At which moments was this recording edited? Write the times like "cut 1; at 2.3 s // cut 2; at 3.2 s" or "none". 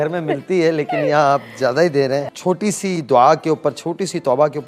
cut 1; at 2.2 s